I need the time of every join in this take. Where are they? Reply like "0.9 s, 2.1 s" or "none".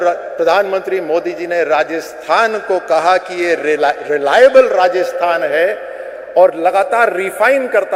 none